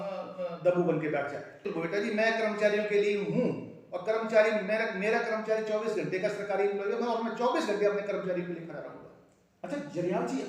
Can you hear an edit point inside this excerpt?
yes; 1 cut; at 1.6 s

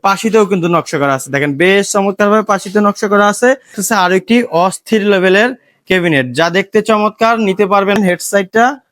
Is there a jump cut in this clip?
yes; 2 cuts; at 3.8 s, 8.0 s

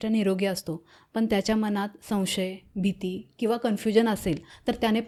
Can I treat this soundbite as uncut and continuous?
yes; 0 cuts

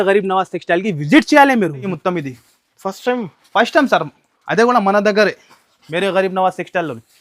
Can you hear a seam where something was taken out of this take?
yes; 1 cut; at 1.9 s

